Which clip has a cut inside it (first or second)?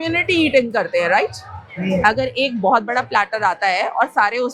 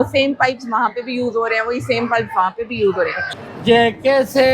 second